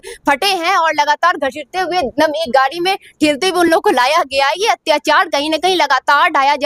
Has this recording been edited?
no; 0 cuts

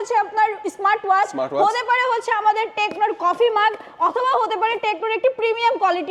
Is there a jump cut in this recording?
no; 0 cuts

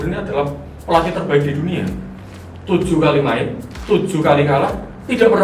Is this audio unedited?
yes; 0 cuts

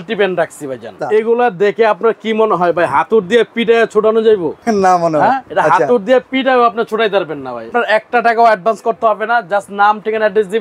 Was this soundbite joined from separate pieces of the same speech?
yes; 4 cuts; at 1.0 s, 4.5 s, 5.4 s, 7.7 s

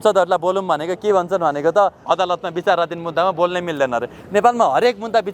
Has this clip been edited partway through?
yes; 1 cut; at 2.0 s

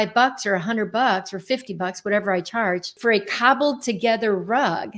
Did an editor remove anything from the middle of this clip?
yes; 1 cut; at 2.9 s

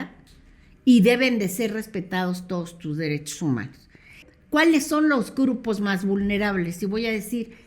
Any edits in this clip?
yes; 1 cut; at 4.2 s

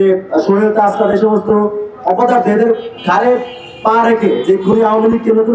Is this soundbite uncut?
yes; 0 cuts

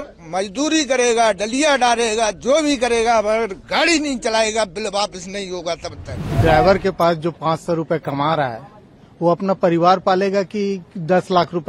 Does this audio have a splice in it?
yes; 1 cut; at 6.4 s

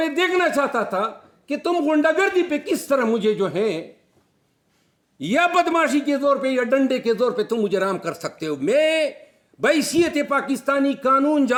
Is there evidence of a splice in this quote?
no; 0 cuts

